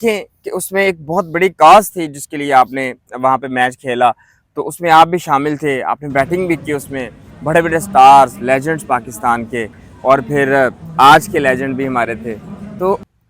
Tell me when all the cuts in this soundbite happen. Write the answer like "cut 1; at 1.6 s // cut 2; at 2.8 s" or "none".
none